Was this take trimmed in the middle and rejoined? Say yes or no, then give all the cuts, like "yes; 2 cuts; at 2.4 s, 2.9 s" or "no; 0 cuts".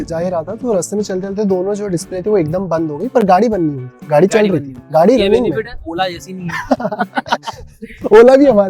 no; 0 cuts